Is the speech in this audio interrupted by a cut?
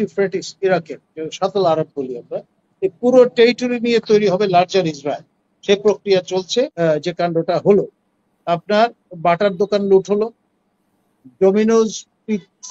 yes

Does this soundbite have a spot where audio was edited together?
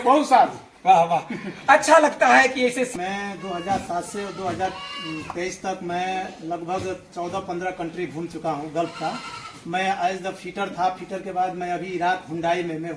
yes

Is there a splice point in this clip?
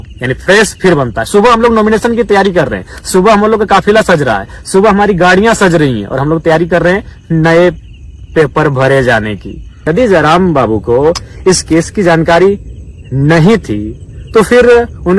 yes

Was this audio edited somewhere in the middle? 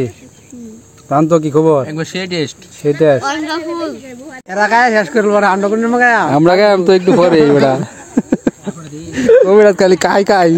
yes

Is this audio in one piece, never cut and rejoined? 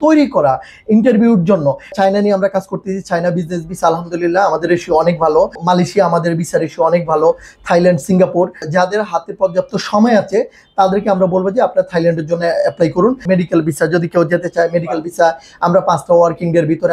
no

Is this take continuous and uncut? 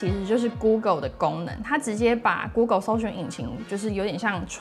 yes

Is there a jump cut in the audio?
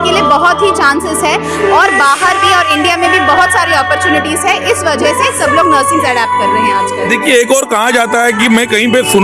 no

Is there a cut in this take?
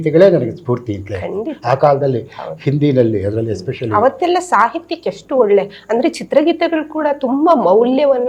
no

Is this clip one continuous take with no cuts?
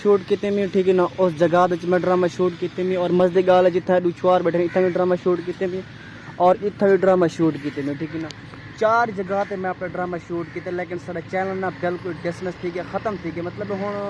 yes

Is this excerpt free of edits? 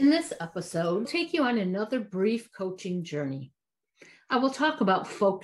no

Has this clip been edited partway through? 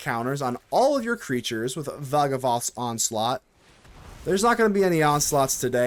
no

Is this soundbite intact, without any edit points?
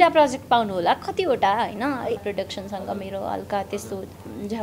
no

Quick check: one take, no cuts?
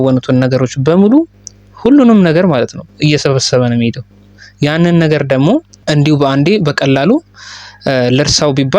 no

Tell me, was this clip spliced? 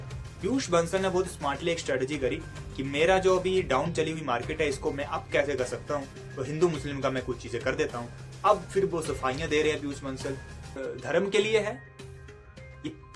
yes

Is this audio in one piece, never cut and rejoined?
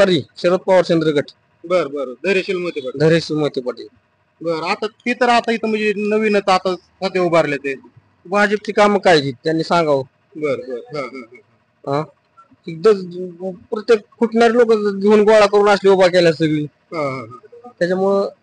yes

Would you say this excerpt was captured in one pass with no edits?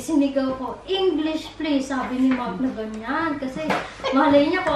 yes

